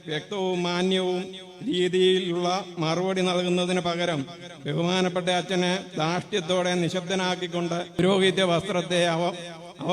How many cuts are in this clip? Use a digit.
1